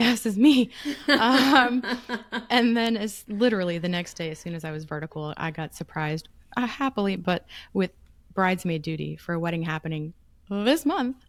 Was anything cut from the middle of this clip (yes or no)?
no